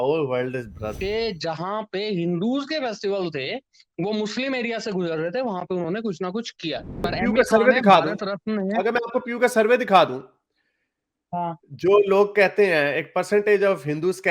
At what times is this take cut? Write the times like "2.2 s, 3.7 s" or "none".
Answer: 0.9 s, 7.1 s